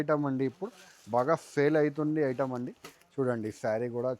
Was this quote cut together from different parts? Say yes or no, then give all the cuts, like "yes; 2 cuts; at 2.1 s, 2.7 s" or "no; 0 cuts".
no; 0 cuts